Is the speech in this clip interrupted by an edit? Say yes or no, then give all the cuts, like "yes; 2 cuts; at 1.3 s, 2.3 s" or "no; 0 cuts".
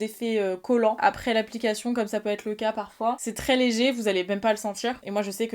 no; 0 cuts